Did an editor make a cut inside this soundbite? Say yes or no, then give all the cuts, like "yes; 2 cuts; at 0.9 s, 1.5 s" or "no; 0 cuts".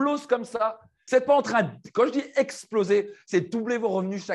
yes; 1 cut; at 1.0 s